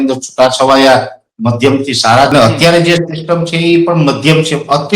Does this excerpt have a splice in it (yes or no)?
yes